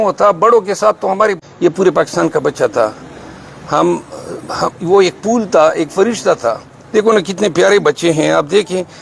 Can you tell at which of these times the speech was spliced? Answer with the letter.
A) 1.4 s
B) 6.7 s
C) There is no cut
A